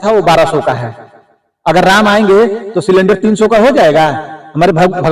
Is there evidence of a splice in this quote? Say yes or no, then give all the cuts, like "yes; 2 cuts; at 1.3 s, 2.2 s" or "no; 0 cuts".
no; 0 cuts